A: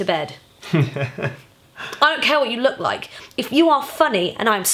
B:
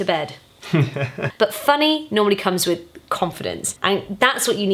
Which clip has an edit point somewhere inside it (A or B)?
B